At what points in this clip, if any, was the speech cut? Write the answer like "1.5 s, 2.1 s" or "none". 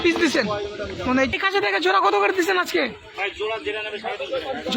1.3 s

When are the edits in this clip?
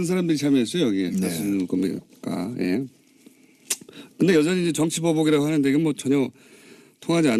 6.0 s

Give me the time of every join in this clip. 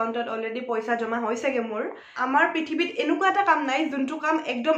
2.1 s

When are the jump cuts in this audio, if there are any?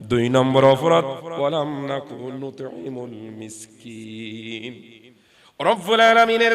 none

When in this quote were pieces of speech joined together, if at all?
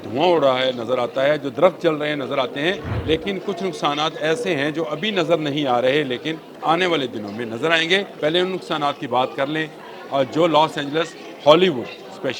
2.9 s, 6.5 s, 8.1 s

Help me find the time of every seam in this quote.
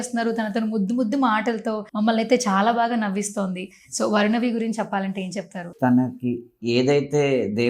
1.8 s, 5.7 s

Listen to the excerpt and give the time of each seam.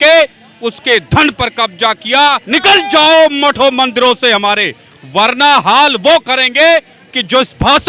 2.4 s

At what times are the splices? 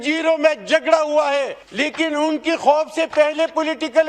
1.6 s

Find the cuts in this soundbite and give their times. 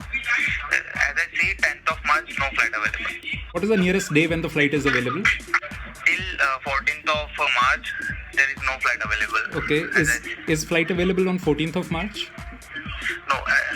3.6 s, 5.6 s

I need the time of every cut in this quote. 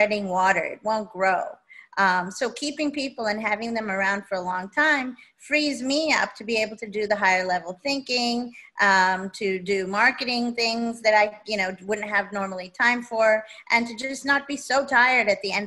none

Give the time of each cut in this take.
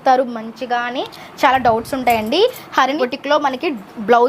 3.0 s

